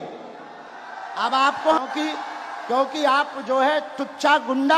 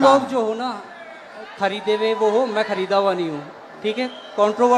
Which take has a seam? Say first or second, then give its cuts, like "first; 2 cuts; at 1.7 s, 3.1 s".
first; 1 cut; at 1.8 s